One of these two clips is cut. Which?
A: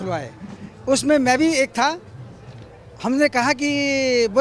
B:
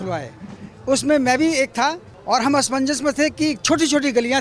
B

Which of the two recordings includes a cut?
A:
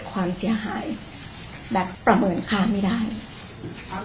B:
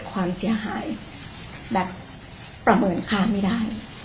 A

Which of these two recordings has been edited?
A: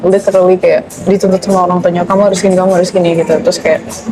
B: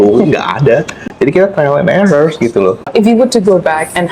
B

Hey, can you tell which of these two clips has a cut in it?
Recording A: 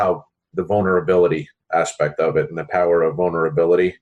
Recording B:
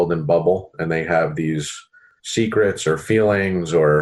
B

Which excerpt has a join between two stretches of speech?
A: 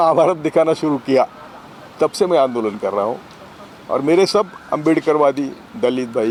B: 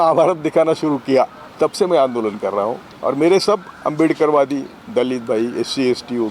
B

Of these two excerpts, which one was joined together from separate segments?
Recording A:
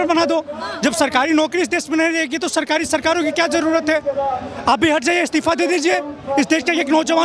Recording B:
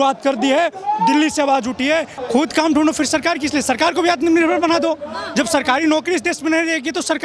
B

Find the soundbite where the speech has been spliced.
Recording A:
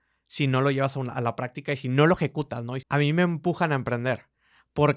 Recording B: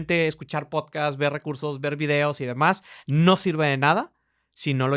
A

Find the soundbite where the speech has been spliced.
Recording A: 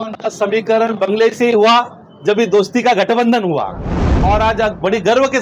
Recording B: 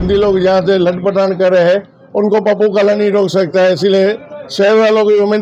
A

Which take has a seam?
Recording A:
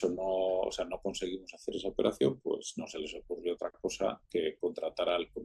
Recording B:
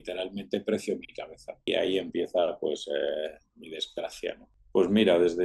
B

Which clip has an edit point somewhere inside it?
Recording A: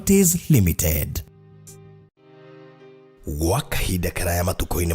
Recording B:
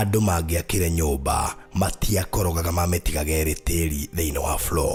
A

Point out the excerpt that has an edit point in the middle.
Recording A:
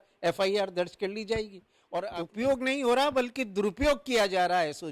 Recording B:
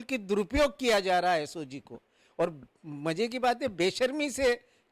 A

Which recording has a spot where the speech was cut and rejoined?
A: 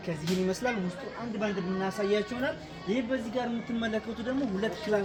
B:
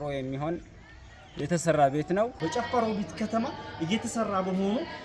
B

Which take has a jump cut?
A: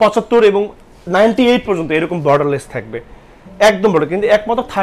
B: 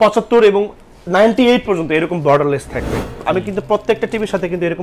B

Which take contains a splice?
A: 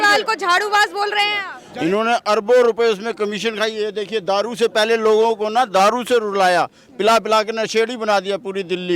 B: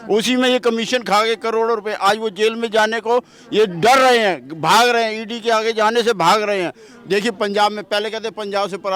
A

